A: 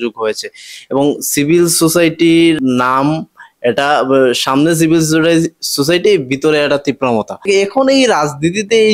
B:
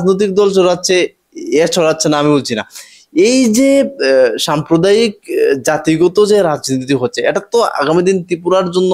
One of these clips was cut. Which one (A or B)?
A